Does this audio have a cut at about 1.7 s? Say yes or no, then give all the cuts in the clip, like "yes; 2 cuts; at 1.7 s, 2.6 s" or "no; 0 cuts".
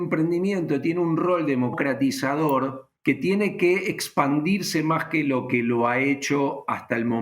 yes; 2 cuts; at 1.7 s, 2.9 s